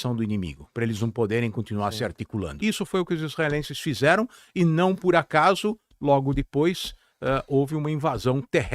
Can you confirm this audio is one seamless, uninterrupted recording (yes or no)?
no